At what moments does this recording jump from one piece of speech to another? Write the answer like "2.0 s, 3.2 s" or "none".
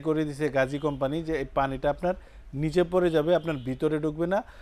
none

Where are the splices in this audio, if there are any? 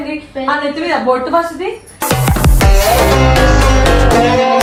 none

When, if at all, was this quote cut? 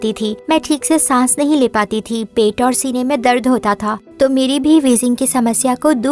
4.1 s

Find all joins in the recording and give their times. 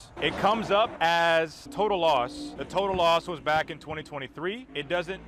none

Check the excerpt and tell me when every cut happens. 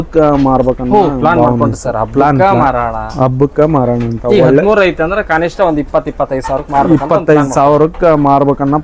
none

